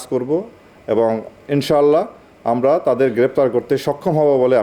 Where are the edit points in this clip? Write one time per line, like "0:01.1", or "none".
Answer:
none